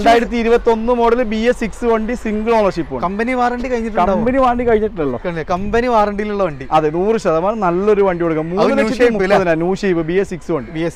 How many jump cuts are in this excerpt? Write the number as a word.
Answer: zero